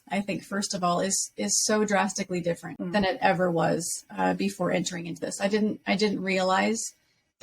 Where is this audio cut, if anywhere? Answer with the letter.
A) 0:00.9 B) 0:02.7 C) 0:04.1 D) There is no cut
B